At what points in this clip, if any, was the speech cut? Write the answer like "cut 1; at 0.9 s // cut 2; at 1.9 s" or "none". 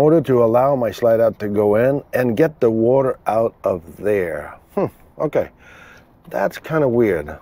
none